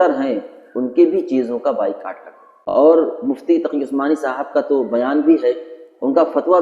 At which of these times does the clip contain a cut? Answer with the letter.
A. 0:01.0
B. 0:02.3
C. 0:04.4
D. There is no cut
B